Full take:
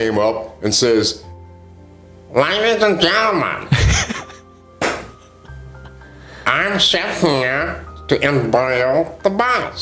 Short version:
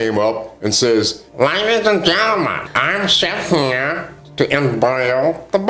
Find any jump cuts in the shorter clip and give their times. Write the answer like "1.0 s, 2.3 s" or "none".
1.2 s, 2.6 s